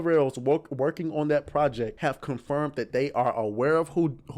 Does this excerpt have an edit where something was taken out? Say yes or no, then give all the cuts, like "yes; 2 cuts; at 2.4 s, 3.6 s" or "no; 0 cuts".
yes; 1 cut; at 1.9 s